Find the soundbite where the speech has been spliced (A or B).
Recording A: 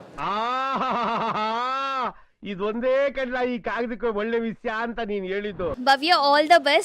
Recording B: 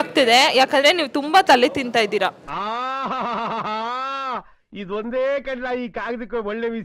A